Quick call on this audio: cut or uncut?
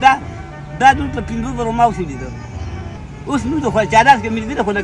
uncut